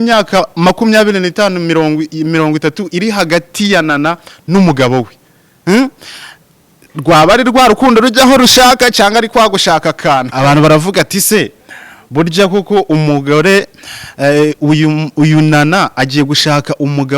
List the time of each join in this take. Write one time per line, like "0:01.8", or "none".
0:10.3